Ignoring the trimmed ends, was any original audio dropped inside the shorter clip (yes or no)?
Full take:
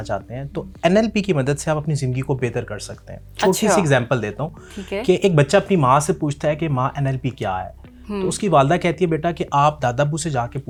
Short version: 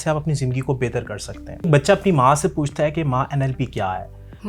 yes